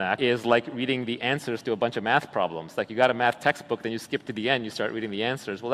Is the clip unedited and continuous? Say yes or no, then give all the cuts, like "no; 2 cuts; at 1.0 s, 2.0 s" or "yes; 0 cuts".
yes; 0 cuts